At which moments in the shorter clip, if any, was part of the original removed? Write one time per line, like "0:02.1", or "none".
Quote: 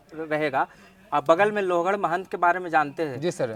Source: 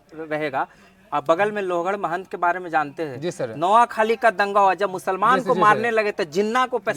none